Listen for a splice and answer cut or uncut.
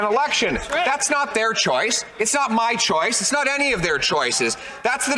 uncut